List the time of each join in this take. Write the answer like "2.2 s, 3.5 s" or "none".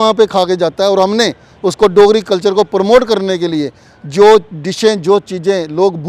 none